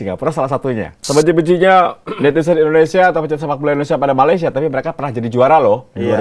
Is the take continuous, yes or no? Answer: no